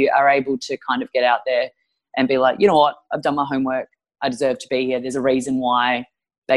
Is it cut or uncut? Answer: uncut